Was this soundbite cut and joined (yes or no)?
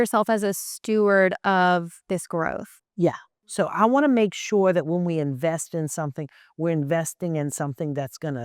yes